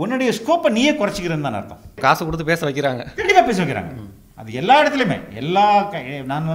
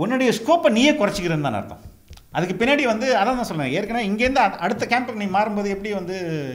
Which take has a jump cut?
first; 1 cut; at 1.9 s

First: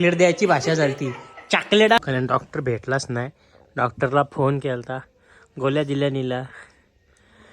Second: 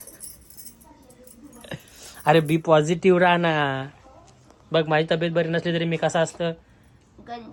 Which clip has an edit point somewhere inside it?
first; 1 cut; at 2.0 s

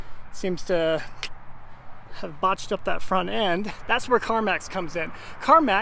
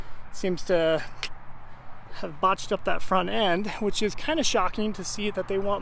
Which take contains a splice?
first; 1 cut; at 3.7 s

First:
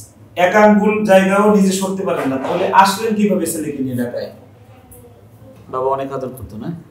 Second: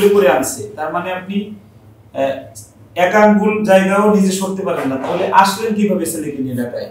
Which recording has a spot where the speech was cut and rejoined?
first; 1 cut; at 5.6 s

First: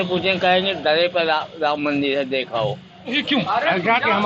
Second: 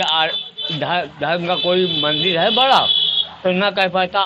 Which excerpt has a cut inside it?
first; 1 cut; at 3.2 s

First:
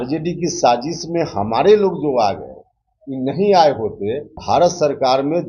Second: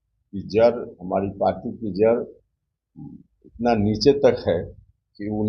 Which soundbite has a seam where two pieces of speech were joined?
first; 1 cut; at 4.3 s

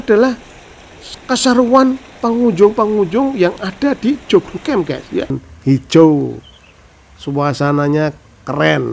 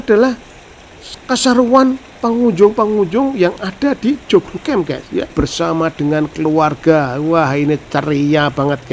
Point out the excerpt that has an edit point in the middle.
first; 1 cut; at 5.3 s

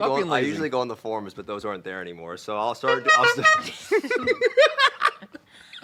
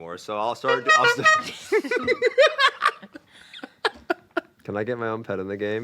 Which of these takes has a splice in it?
second; 1 cut; at 4.5 s

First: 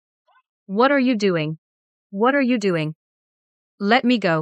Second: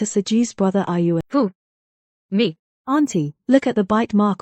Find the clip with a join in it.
second; 2 cuts; at 1.2 s, 2.7 s

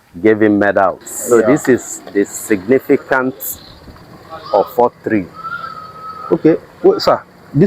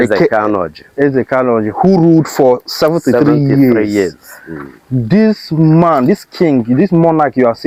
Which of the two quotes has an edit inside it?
first; 1 cut; at 1.1 s

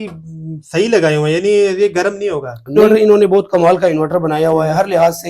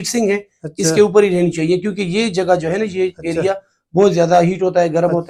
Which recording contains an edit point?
first; 1 cut; at 2.8 s

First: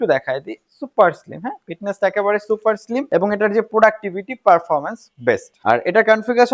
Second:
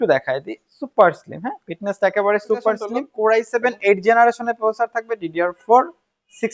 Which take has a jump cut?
second; 1 cut; at 2.9 s

